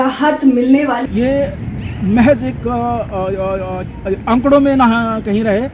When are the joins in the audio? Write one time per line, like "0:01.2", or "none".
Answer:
0:01.0